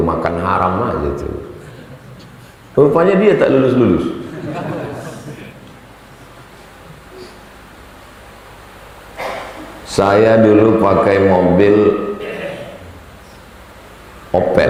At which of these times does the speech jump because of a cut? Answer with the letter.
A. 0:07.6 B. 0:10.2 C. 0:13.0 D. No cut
D